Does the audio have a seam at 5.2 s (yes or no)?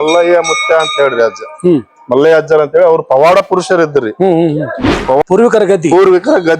yes